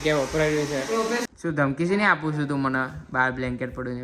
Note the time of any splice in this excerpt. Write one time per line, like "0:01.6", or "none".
0:01.3